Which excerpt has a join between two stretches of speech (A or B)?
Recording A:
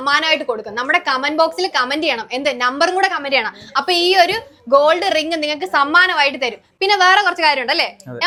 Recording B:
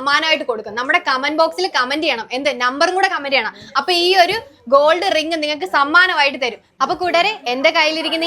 B